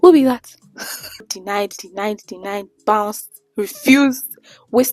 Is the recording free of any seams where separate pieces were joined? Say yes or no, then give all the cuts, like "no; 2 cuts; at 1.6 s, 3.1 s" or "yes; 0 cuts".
no; 1 cut; at 1.4 s